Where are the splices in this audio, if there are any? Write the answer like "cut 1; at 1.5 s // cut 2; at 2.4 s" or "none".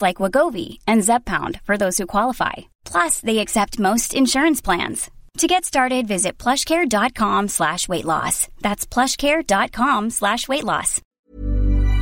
cut 1; at 11.0 s